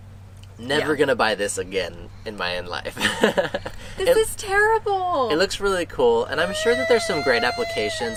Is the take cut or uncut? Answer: uncut